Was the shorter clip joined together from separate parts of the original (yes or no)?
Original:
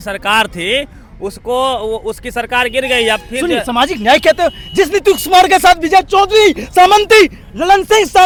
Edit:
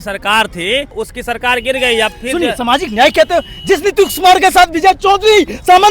yes